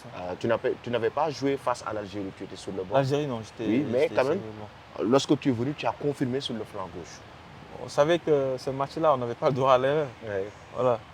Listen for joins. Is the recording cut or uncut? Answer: cut